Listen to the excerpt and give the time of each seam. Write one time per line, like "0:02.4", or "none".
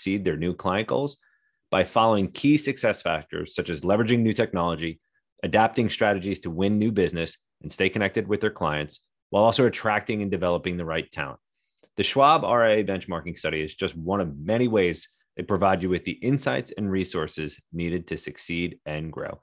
none